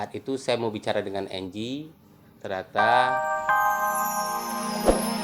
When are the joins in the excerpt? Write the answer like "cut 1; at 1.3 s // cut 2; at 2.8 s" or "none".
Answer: cut 1; at 3.1 s